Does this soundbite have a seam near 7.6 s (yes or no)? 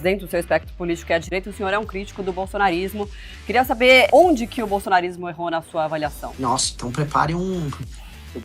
no